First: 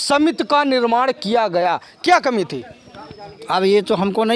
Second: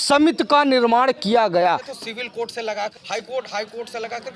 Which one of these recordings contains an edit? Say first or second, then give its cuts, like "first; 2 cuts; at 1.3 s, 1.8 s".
second; 1 cut; at 1.9 s